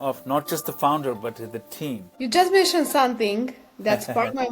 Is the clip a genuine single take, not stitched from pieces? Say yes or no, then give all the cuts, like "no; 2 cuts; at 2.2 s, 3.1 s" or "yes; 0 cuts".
no; 1 cut; at 2.1 s